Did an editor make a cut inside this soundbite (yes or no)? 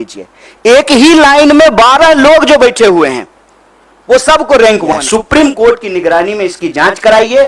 yes